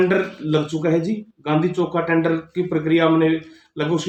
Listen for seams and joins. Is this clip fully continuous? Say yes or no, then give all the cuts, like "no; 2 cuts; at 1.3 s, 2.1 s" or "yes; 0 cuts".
yes; 0 cuts